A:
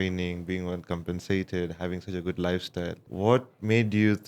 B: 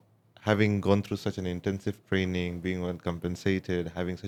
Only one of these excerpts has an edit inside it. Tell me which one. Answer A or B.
A